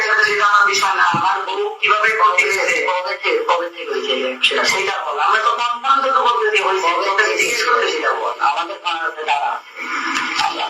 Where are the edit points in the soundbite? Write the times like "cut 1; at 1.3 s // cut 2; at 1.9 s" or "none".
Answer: none